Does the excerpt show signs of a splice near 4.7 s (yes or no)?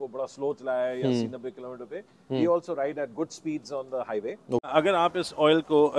yes